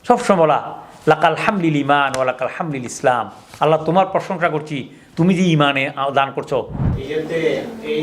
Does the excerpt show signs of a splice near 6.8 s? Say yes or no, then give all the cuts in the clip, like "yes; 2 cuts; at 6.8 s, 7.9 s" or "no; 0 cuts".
yes; 1 cut; at 6.8 s